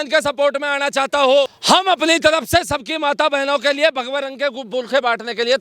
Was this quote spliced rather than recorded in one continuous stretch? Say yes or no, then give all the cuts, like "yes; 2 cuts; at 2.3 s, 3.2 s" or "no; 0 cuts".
yes; 1 cut; at 1.6 s